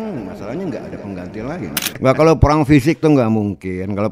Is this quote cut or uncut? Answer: cut